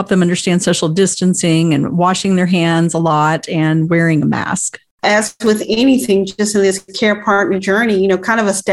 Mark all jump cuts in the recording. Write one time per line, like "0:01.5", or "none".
0:05.0